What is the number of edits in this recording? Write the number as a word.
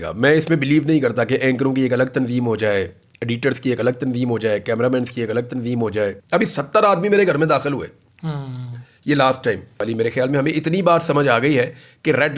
two